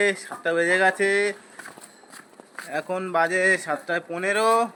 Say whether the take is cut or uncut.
uncut